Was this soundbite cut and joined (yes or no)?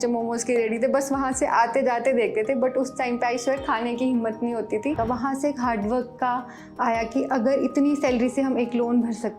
yes